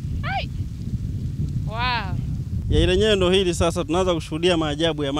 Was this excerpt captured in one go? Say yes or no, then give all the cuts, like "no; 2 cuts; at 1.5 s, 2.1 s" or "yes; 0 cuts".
no; 1 cut; at 2.6 s